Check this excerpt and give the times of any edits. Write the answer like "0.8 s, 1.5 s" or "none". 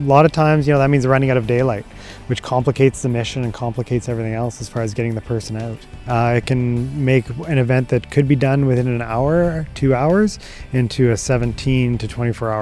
6.0 s